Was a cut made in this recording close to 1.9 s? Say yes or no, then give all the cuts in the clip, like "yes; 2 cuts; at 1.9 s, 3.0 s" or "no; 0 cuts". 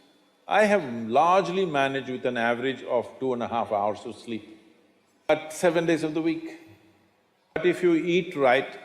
no; 2 cuts; at 5.3 s, 7.6 s